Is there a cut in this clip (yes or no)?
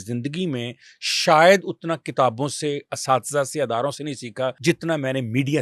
yes